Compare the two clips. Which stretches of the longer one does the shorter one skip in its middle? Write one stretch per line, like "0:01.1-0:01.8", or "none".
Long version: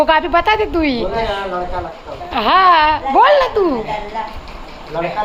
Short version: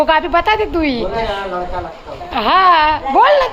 none